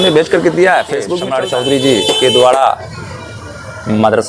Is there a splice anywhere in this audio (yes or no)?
yes